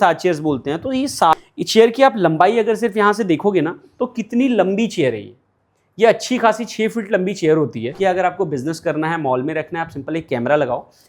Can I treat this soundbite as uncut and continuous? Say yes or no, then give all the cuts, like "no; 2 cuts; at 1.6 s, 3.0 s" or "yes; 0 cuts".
no; 2 cuts; at 1.3 s, 7.9 s